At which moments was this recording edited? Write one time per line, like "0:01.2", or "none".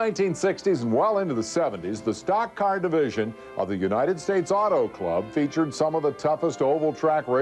0:04.3